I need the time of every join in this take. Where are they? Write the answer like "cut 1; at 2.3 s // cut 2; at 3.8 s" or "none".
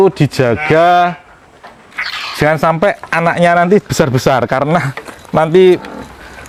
none